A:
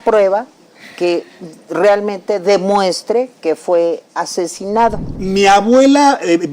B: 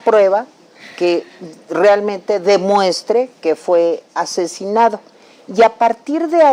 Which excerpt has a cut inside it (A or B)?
A